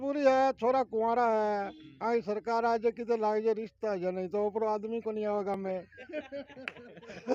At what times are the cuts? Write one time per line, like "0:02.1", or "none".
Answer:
none